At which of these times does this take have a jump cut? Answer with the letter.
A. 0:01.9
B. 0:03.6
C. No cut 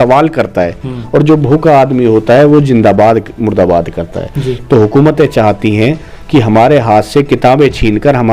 C